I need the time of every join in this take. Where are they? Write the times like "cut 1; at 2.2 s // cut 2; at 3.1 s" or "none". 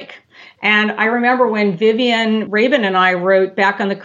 cut 1; at 2.5 s